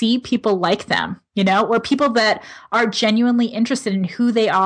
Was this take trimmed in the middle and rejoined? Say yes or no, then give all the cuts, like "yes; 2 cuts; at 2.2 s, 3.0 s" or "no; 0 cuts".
no; 0 cuts